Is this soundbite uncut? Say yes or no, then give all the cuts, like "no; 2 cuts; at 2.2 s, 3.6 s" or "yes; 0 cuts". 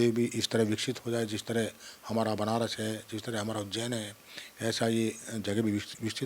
yes; 0 cuts